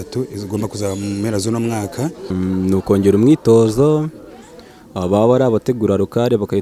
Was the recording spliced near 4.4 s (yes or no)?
no